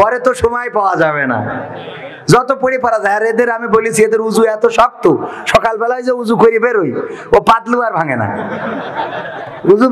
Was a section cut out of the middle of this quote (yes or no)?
no